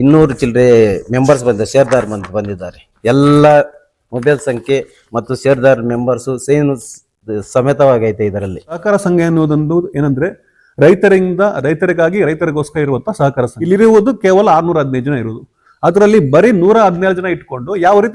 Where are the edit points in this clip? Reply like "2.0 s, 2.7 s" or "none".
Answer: 8.8 s, 13.6 s